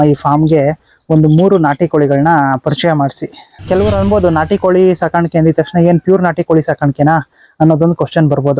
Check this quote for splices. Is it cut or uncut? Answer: cut